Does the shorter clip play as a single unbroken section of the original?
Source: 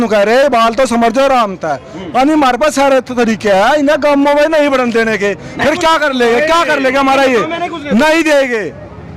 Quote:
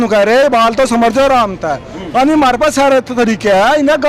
yes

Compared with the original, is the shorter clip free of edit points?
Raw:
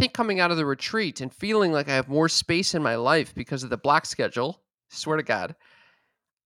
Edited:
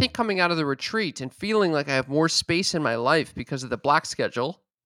yes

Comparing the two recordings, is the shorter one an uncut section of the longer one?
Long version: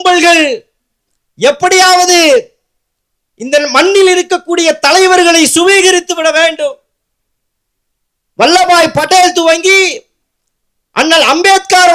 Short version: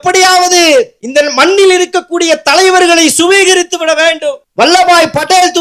no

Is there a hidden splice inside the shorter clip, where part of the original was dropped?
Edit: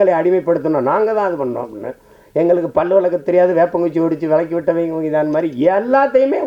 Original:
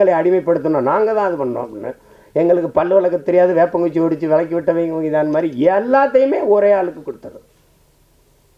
no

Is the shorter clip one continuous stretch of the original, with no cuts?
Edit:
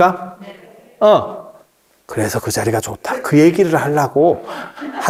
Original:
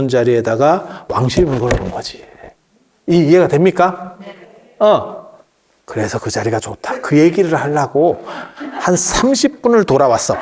yes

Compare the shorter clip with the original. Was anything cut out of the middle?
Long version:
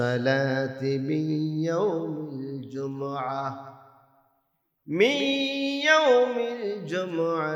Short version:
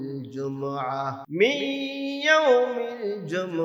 yes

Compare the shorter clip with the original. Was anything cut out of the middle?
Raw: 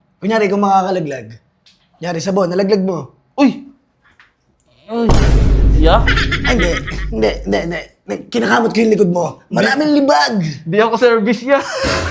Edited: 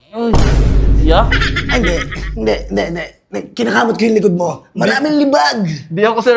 no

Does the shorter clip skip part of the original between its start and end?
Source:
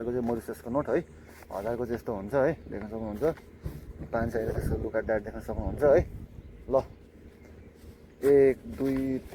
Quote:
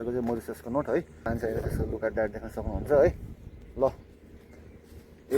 yes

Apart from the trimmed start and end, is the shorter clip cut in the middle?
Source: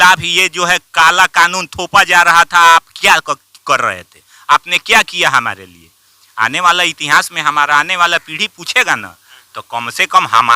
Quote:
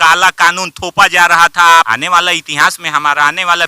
yes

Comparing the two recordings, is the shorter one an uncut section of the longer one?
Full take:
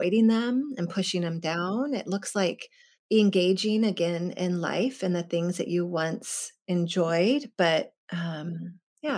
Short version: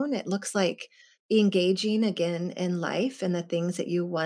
yes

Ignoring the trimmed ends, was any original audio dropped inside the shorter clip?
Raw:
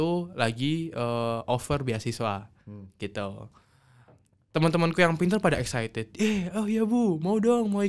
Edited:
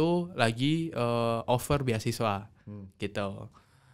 no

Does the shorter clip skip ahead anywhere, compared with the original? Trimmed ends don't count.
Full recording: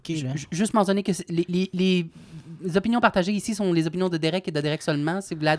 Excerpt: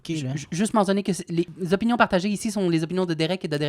yes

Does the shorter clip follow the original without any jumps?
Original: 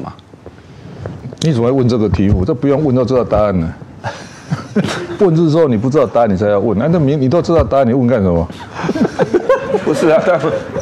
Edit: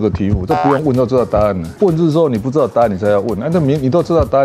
no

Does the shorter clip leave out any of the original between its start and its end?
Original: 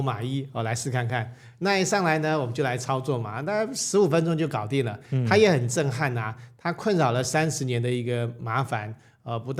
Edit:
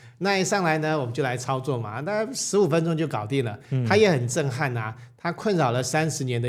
no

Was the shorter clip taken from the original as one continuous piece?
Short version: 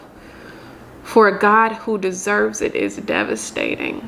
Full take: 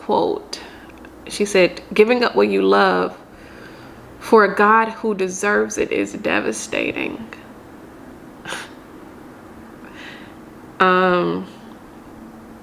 yes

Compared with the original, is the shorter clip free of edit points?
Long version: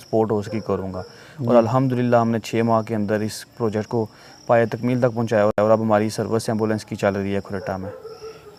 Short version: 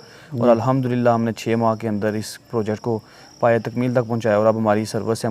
no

